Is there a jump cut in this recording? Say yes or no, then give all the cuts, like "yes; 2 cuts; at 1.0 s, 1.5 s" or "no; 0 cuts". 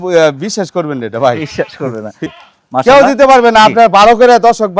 yes; 1 cut; at 2.2 s